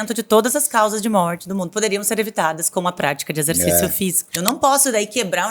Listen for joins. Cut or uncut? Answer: cut